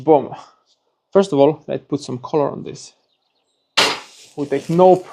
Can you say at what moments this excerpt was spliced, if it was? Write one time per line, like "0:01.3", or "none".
0:04.2